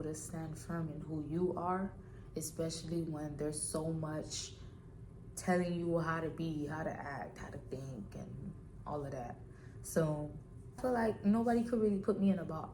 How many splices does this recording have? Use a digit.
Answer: 1